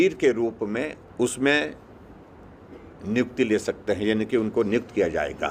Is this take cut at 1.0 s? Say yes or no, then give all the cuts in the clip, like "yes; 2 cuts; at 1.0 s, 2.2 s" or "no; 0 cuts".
yes; 1 cut; at 1.0 s